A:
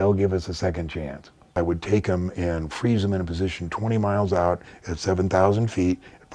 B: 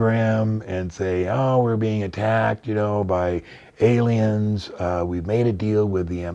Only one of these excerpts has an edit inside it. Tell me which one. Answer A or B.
A